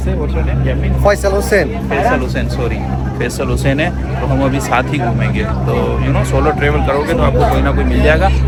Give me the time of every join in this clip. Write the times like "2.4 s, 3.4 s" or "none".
none